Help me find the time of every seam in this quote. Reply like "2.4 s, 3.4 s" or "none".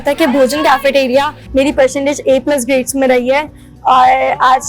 1.4 s